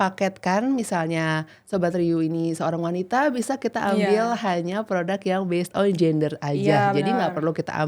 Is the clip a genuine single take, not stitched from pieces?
yes; 0 cuts

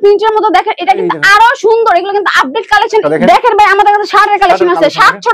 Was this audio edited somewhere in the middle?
yes; 1 cut; at 3.0 s

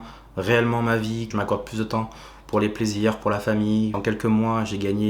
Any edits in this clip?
yes; 2 cuts; at 1.3 s, 4.0 s

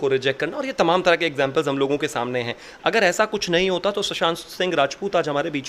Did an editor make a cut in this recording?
no; 0 cuts

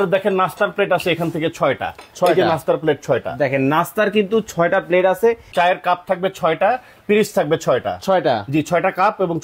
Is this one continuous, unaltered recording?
no; 1 cut; at 5.5 s

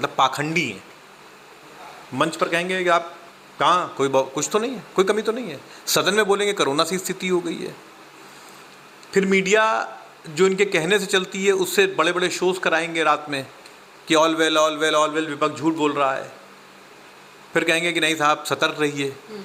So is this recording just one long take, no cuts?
yes; 0 cuts

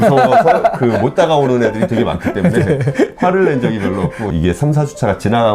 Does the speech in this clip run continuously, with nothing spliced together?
no; 1 cut; at 4.3 s

